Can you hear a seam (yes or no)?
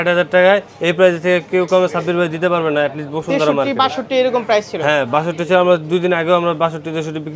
no